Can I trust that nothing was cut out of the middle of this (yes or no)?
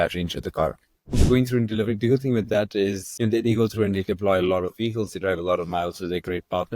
no